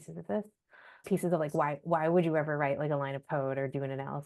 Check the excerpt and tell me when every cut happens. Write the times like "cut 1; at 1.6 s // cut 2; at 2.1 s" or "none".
cut 1; at 1.0 s